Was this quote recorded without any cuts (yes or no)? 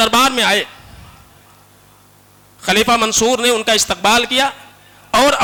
yes